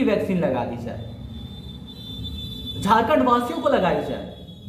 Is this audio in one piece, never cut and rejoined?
yes; 0 cuts

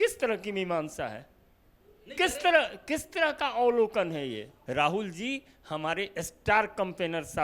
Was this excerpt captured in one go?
no; 1 cut; at 4.5 s

